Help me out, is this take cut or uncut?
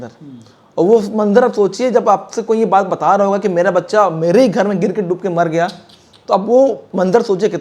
uncut